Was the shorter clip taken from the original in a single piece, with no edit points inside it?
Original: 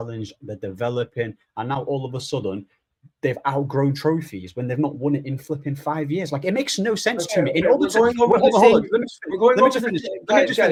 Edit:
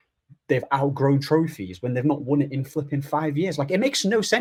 yes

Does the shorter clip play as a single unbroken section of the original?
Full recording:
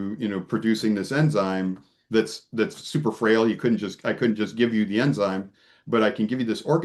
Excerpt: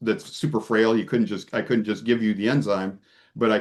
yes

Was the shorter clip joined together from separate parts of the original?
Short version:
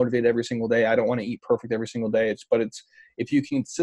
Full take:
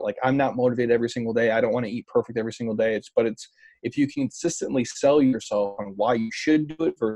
no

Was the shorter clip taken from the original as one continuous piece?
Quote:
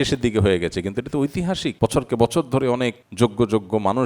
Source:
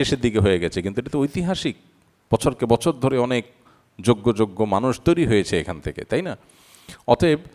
no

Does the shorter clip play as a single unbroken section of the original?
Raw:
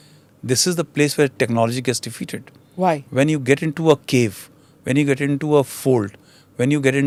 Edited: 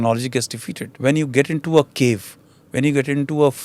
no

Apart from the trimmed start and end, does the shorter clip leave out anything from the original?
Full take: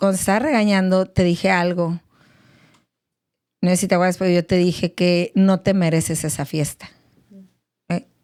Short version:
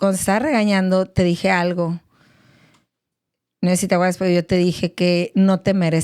no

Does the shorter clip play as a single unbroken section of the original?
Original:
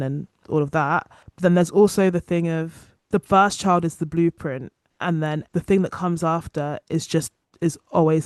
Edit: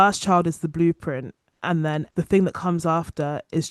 yes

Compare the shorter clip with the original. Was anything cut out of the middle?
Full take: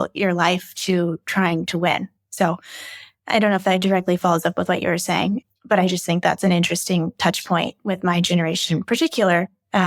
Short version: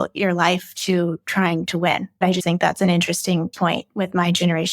yes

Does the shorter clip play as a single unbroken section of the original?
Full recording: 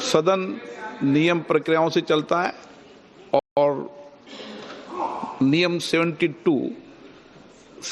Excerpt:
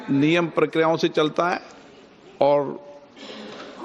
no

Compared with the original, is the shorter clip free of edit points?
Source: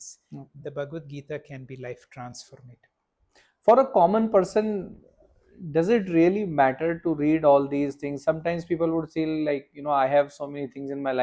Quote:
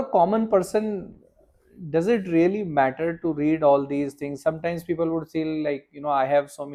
yes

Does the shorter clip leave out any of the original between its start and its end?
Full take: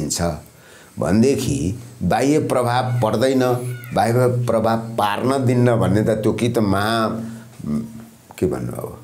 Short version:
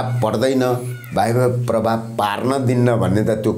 no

